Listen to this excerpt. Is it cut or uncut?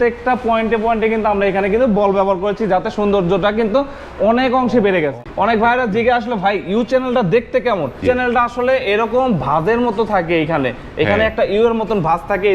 cut